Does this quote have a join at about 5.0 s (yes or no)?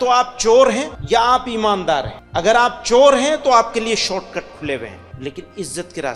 yes